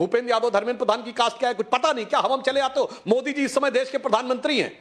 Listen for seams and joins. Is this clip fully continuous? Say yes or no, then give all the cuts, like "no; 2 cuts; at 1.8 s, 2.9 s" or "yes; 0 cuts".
yes; 0 cuts